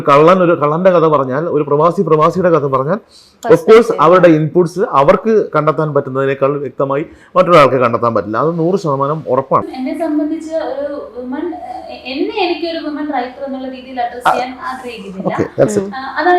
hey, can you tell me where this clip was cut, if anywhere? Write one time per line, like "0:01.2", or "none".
0:09.7